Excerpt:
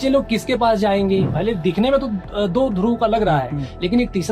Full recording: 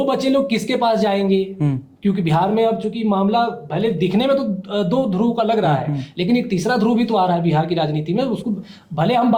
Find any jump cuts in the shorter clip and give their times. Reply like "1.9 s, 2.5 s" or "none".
1.3 s